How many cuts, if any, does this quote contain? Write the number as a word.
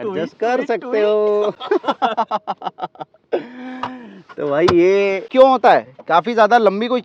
zero